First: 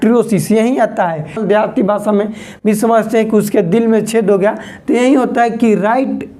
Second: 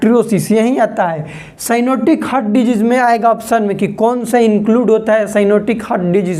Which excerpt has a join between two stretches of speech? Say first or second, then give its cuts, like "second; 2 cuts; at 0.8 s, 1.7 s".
first; 1 cut; at 1.4 s